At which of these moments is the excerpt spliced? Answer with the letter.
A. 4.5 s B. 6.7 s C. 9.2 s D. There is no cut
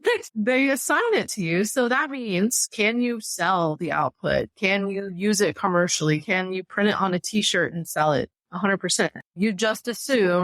C